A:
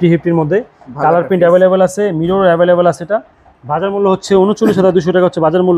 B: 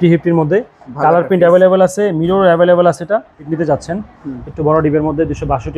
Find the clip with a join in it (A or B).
B